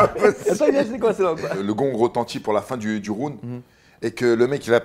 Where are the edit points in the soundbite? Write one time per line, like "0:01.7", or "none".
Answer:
0:01.6